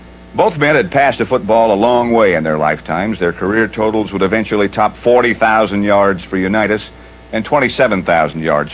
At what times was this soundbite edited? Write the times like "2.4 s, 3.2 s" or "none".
none